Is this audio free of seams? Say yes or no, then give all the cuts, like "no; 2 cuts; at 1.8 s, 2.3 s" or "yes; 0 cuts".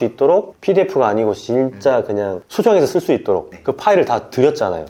yes; 0 cuts